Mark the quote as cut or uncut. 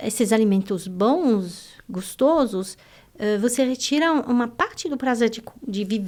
uncut